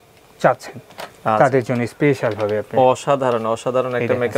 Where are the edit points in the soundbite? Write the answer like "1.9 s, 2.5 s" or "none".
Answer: none